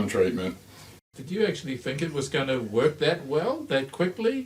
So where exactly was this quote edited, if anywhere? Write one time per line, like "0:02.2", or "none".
0:01.2